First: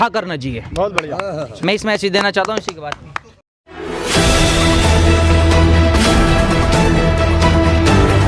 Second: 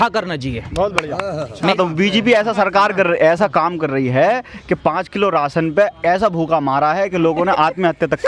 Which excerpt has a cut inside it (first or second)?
second